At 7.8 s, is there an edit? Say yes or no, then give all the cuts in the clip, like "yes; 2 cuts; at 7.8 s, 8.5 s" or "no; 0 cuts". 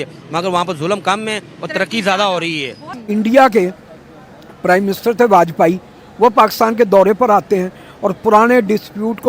no; 1 cut; at 2.9 s